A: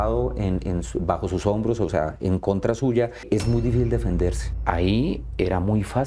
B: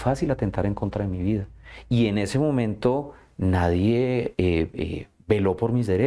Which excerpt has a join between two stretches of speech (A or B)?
A